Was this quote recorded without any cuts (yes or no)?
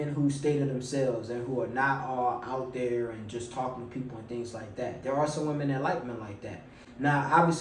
yes